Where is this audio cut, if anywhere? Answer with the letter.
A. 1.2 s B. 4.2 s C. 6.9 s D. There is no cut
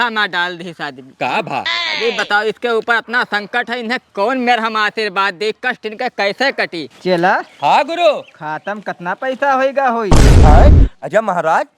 C